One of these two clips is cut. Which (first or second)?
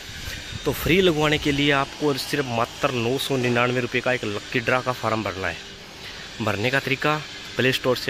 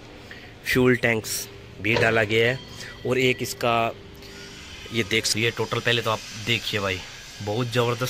second